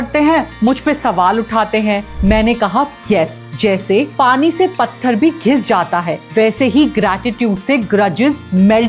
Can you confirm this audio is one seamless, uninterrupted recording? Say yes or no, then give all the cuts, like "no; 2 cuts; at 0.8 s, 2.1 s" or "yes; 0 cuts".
no; 2 cuts; at 2.1 s, 3.4 s